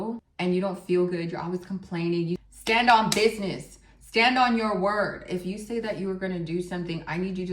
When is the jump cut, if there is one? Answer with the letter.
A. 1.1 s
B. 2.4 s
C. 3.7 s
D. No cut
B